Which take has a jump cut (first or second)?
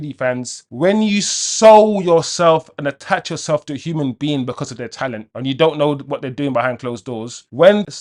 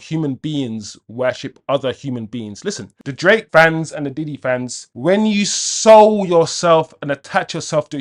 second